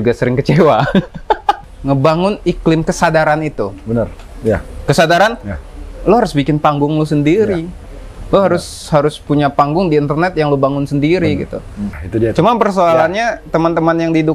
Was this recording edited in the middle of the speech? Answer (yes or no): yes